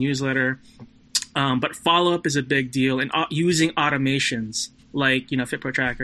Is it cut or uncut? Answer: uncut